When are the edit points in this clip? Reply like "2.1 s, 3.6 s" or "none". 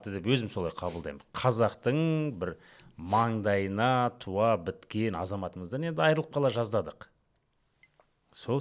none

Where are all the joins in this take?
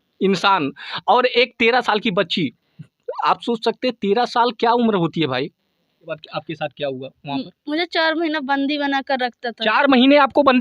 6.3 s

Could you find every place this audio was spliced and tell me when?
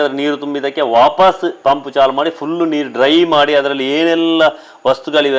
none

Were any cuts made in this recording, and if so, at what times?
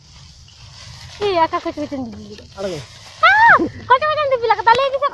none

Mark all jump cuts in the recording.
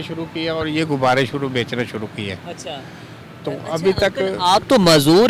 none

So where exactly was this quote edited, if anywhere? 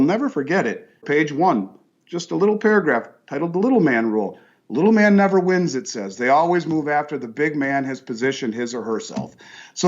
1.0 s

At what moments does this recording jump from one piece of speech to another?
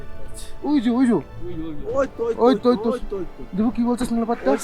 none

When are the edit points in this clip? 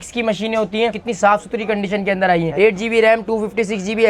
1.0 s, 2.5 s

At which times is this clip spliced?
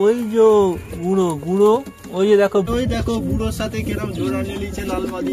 2.7 s

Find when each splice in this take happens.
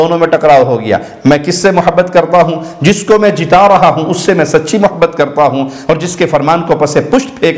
none

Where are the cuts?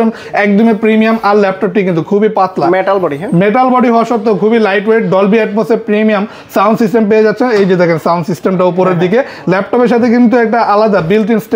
none

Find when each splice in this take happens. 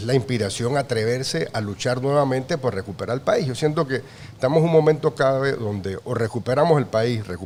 none

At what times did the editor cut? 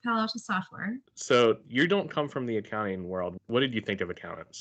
1.1 s, 3.3 s

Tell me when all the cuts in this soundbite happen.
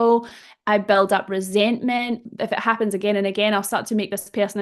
2.3 s

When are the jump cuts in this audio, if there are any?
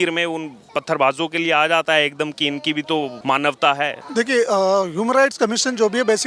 3.2 s, 4.0 s

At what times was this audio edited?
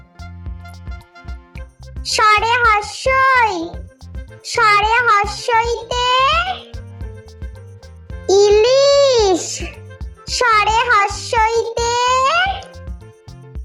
none

